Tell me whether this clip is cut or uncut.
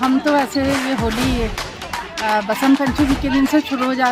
uncut